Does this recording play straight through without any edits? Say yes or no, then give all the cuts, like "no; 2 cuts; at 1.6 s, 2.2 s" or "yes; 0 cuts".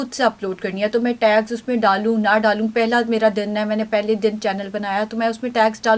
yes; 0 cuts